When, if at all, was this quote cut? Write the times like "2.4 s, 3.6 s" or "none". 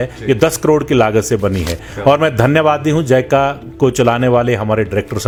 none